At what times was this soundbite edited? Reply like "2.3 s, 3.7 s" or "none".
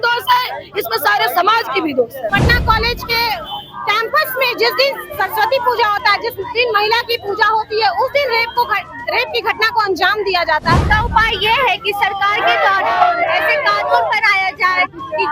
2.3 s, 10.8 s

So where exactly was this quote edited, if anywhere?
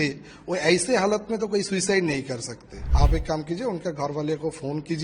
2.8 s

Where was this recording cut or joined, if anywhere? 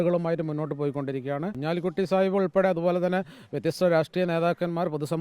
1.5 s

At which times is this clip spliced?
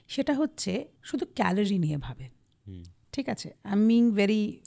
1.0 s

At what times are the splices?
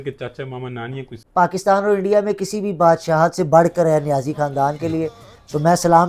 1.2 s

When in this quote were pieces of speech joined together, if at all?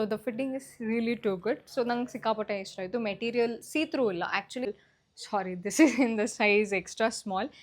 4.7 s

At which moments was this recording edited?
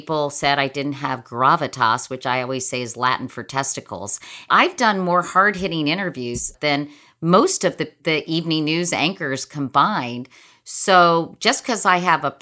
4.5 s, 6.5 s, 8.0 s

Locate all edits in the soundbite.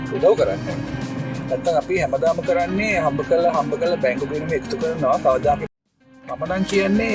5.6 s

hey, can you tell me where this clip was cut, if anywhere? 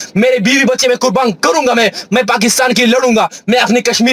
none

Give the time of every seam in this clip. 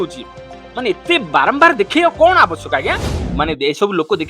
3.1 s

